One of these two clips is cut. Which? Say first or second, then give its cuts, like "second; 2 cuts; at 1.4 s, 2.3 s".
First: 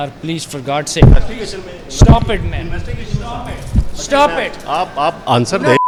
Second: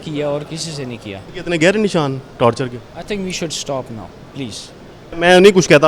second; 2 cuts; at 1.3 s, 5.1 s